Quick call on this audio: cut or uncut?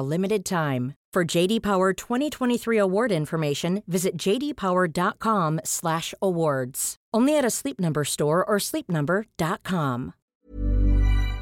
cut